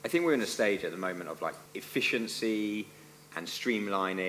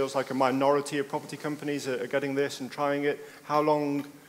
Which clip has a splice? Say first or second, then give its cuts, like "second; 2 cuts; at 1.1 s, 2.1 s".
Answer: first; 1 cut; at 1.7 s